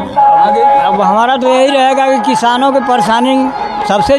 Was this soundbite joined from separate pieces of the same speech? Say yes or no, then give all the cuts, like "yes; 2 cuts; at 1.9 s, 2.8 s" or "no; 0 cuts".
no; 0 cuts